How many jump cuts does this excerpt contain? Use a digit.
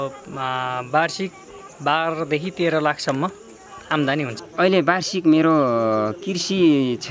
1